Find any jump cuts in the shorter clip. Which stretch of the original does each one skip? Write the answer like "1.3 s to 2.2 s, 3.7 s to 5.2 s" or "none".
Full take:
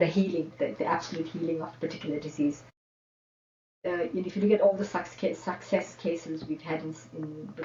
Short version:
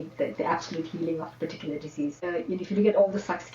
2.6 s to 3.9 s

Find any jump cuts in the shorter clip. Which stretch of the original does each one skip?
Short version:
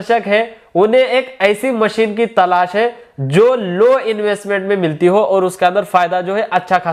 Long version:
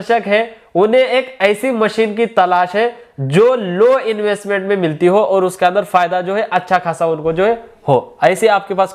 none

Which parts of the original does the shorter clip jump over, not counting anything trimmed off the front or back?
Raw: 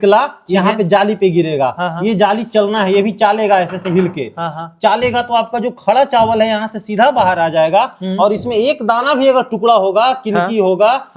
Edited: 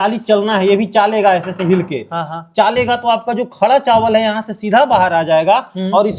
none

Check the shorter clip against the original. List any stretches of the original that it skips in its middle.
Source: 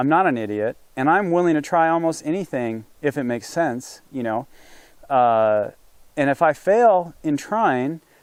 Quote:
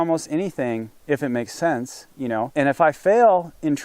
4.4 s to 6.1 s

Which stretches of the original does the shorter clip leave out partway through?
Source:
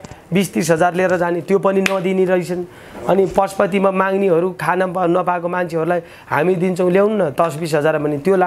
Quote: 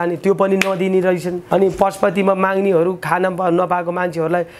2.6 s to 2.9 s

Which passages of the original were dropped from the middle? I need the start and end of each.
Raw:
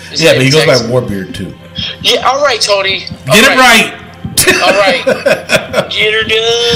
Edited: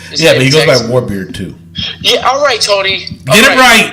none

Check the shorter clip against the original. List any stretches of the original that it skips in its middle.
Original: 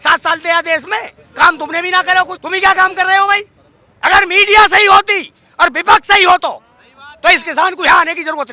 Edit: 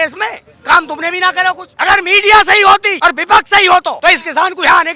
2.4 s to 3.9 s, 5.2 s to 5.5 s, 6.5 s to 7.2 s

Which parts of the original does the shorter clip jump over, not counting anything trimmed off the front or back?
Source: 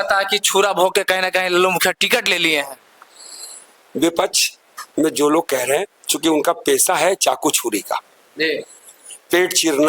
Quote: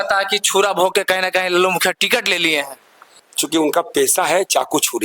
3.3 s to 6.0 s

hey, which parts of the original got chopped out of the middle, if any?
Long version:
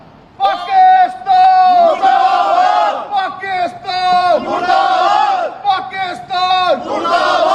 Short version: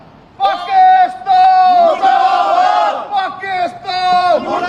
none

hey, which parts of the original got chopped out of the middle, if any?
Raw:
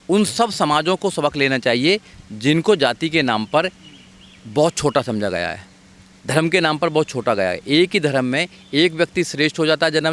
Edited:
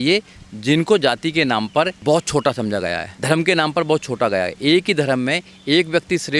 3.7 s to 4.4 s, 5.6 s to 6.1 s

